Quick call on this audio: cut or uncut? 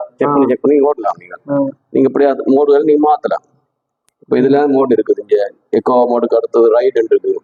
uncut